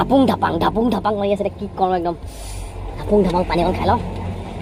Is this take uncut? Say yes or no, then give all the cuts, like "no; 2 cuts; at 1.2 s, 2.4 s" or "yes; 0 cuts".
yes; 0 cuts